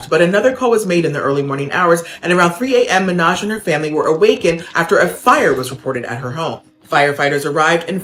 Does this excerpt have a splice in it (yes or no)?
no